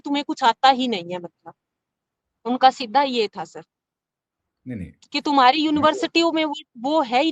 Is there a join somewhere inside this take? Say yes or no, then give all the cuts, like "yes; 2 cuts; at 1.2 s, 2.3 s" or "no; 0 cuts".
no; 0 cuts